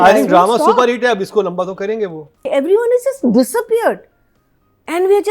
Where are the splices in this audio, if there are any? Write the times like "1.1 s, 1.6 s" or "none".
2.5 s